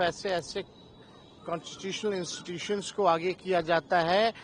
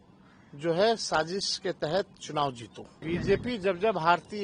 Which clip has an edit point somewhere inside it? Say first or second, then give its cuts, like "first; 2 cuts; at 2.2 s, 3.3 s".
second; 1 cut; at 2.9 s